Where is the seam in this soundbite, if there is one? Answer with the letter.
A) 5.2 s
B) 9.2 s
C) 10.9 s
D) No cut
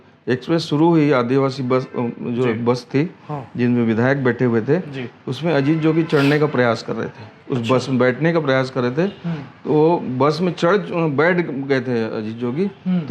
D